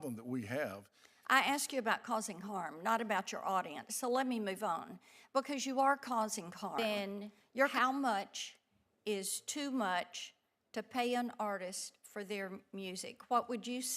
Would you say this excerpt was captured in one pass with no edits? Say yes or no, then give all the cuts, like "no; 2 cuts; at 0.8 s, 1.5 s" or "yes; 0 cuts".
no; 1 cut; at 6.8 s